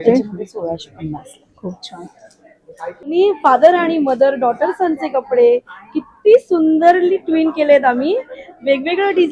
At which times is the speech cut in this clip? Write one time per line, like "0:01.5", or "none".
0:03.1